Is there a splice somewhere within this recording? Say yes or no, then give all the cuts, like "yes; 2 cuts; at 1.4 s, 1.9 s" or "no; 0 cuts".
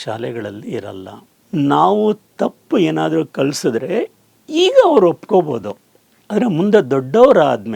yes; 1 cut; at 1.4 s